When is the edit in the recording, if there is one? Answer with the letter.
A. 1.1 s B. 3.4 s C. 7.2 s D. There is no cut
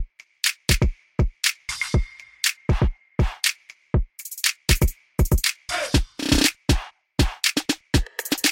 A